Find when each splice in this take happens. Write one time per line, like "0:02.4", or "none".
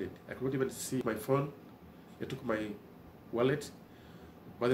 0:01.0